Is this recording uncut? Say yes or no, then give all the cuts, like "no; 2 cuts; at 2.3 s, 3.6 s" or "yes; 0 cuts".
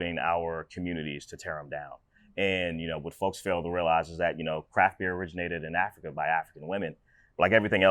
yes; 0 cuts